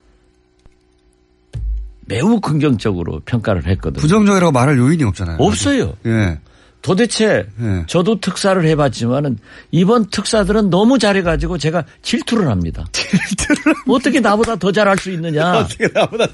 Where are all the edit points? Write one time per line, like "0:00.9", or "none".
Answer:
0:04.2